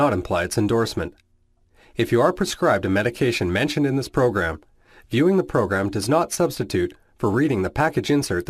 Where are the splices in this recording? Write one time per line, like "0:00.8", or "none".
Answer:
none